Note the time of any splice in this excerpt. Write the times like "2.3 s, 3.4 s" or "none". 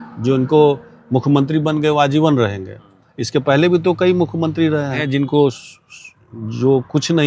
5.0 s